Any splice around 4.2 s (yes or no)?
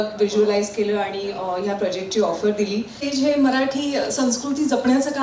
no